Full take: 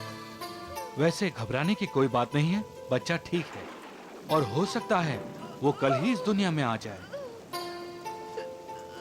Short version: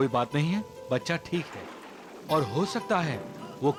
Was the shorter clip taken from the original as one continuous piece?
yes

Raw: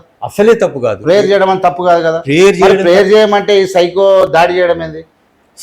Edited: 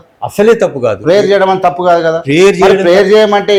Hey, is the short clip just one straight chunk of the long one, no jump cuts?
yes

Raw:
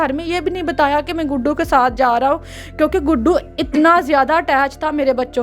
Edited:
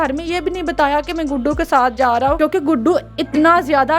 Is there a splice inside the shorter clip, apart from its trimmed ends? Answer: yes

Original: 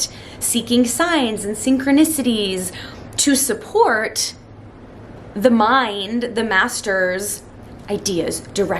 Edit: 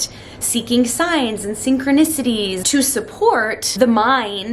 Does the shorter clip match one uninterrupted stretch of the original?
no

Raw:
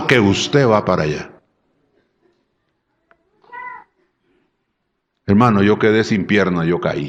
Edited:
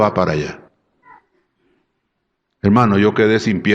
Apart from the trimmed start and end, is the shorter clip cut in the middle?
yes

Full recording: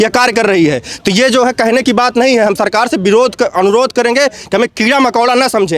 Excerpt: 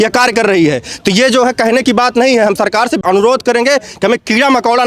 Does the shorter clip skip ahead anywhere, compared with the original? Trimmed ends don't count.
yes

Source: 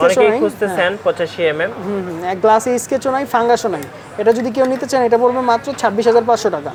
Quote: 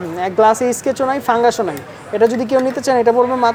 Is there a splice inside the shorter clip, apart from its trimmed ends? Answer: no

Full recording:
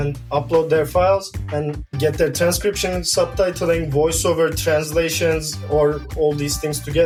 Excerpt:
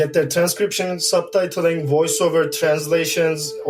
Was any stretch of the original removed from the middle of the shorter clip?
no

